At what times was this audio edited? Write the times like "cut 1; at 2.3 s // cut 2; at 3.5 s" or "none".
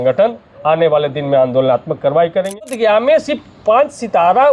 cut 1; at 2.7 s